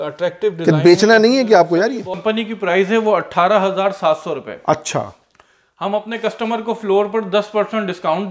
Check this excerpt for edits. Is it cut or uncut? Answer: cut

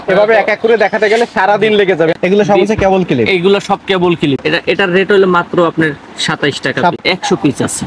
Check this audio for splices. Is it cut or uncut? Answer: cut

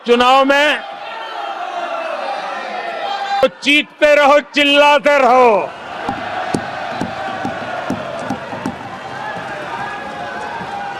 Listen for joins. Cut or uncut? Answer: cut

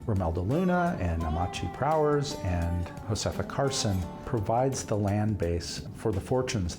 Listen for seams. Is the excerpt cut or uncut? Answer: cut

